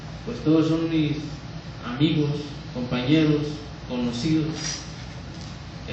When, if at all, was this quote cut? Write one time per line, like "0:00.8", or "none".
0:00.9